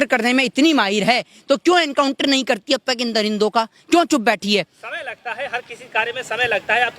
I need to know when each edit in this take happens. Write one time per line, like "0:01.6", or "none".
none